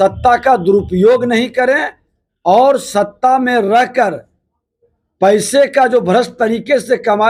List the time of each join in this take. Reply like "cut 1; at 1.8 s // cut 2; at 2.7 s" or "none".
none